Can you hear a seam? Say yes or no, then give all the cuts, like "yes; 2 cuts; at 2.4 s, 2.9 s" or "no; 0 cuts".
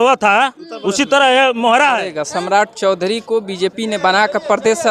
yes; 1 cut; at 2.2 s